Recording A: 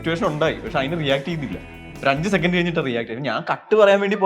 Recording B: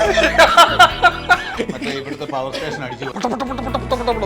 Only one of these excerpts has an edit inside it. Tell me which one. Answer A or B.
B